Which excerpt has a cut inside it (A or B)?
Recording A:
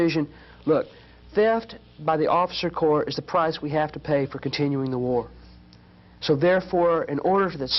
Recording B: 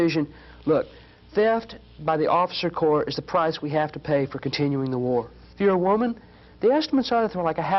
B